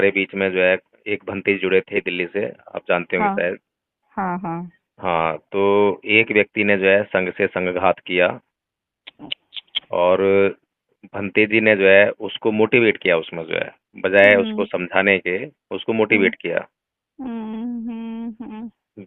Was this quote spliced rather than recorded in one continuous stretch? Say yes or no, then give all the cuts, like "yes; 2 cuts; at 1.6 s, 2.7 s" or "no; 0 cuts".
yes; 1 cut; at 1.9 s